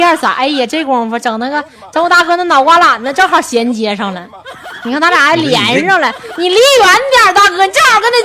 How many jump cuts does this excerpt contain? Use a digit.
0